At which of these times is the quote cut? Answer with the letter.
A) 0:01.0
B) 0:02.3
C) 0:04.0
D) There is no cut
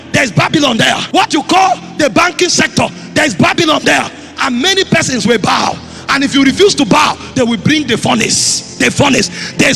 A